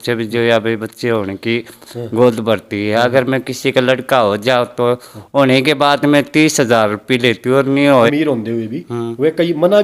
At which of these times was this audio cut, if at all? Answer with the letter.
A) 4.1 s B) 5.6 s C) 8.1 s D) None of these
C